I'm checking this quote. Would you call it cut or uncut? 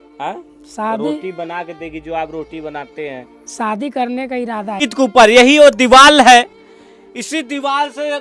cut